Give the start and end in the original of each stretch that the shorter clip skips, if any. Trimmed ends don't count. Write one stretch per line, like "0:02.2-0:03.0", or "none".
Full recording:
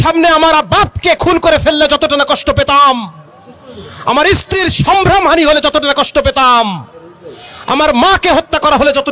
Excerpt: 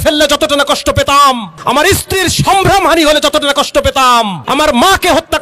0:03.1-0:03.9
0:06.8-0:07.6